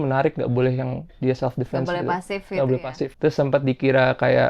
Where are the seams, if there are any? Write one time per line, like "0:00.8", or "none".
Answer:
0:03.0

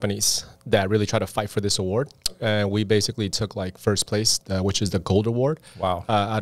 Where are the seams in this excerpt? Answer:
none

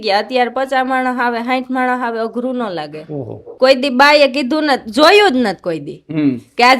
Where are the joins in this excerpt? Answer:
0:03.4

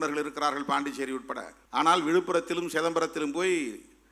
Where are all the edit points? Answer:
0:01.5

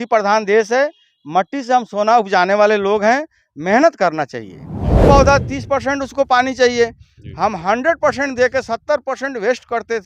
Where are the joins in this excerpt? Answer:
0:05.0

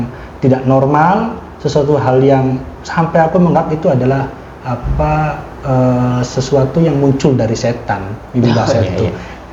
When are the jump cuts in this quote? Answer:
none

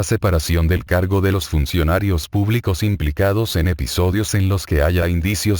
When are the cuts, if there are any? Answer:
0:01.4

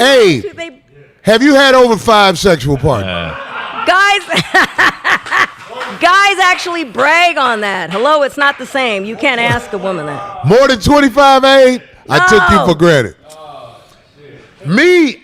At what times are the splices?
0:02.4

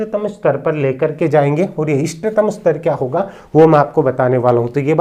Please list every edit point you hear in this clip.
none

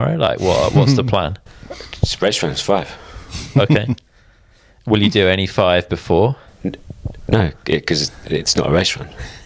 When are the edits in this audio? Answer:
none

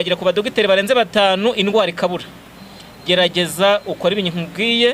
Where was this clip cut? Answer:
none

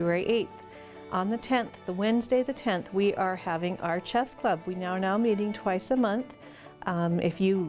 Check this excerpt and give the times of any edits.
none

